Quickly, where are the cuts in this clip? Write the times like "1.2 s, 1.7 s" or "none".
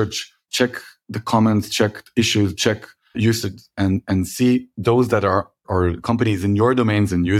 3.4 s, 4.7 s, 5.6 s